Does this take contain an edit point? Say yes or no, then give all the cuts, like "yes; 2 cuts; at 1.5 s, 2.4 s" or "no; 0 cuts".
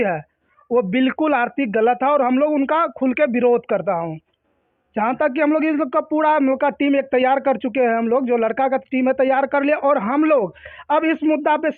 no; 0 cuts